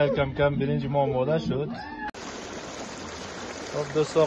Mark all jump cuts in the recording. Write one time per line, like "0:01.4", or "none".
0:02.1